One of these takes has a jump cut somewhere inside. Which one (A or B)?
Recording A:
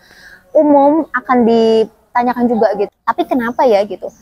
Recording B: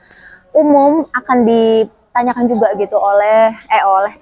A